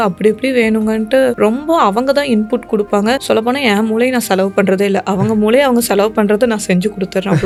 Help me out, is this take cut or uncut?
uncut